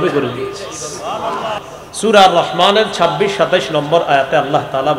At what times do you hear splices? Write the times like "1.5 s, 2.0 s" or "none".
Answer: 1.7 s